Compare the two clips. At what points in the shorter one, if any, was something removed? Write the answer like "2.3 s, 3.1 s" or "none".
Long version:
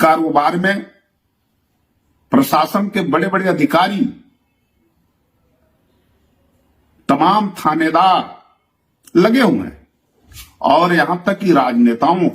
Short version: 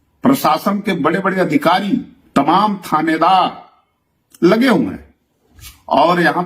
2.2 s